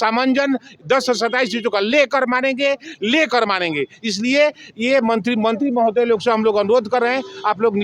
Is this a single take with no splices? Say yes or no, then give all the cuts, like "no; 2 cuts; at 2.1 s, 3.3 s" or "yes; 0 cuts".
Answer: yes; 0 cuts